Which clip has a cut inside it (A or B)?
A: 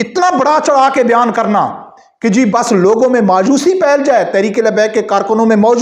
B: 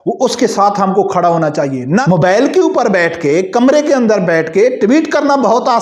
B